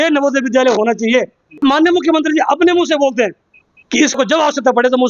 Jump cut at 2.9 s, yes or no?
no